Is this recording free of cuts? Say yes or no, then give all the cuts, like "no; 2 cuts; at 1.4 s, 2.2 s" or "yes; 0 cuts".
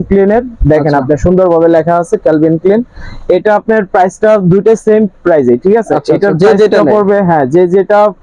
yes; 0 cuts